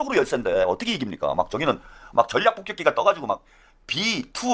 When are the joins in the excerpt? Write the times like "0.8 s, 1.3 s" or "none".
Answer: none